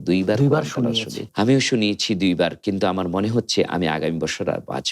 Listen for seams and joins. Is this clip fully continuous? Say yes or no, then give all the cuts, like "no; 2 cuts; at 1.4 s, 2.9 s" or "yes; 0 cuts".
no; 1 cut; at 1.2 s